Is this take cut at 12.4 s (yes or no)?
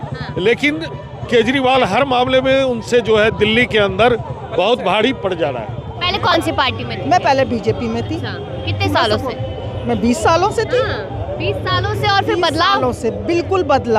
no